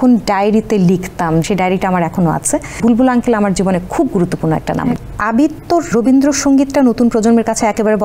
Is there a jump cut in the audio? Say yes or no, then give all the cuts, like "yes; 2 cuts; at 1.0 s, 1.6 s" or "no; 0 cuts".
yes; 4 cuts; at 1.4 s, 2.8 s, 5.1 s, 5.9 s